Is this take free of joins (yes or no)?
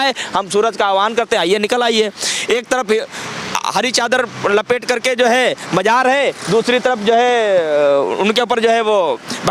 yes